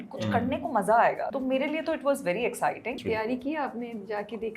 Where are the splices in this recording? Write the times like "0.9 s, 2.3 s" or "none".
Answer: 1.3 s, 3.0 s